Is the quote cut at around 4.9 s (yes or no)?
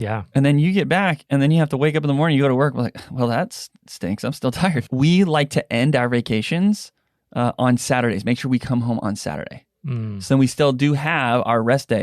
yes